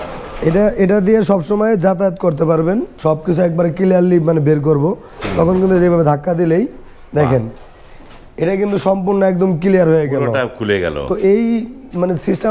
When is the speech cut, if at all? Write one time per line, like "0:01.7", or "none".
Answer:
0:02.9